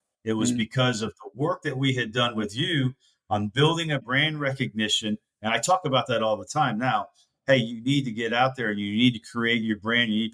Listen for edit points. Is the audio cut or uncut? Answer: uncut